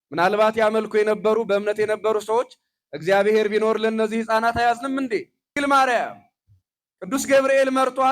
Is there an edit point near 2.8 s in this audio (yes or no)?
no